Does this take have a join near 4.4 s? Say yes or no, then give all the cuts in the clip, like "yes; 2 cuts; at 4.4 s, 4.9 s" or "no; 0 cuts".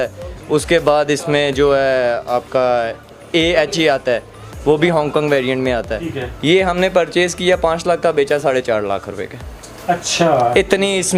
no; 1 cut; at 6.1 s